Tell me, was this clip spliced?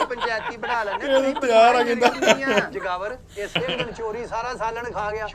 yes; 1 cut; at 3.5 s

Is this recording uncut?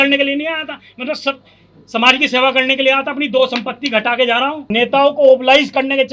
no; 1 cut; at 4.6 s

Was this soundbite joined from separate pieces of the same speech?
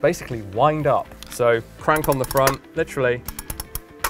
yes; 1 cut; at 1.7 s

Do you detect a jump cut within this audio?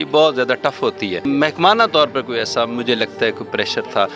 yes; 1 cut; at 1.2 s

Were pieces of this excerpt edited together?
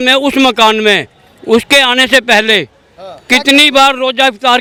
no; 0 cuts

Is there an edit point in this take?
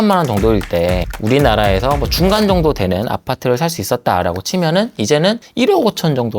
no; 0 cuts

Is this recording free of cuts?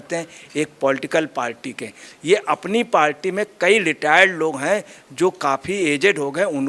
yes; 0 cuts

